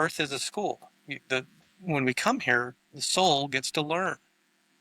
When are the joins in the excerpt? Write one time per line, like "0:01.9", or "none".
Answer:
none